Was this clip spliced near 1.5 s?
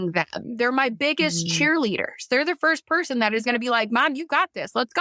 no; 0 cuts

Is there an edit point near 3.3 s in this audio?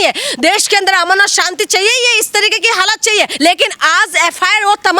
yes; 1 cut; at 3.3 s

